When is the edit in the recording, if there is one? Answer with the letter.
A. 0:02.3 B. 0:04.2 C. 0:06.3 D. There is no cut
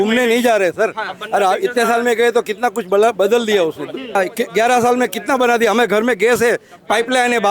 B